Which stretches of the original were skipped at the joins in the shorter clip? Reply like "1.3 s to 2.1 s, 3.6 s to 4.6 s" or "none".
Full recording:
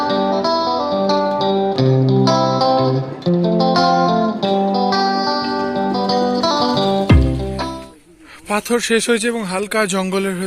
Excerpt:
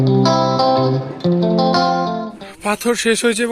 4.3 s to 8.1 s